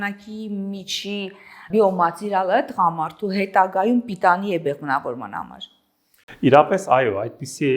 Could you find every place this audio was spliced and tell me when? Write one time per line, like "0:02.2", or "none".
none